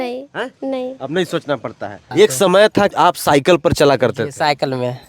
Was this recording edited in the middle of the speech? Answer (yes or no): yes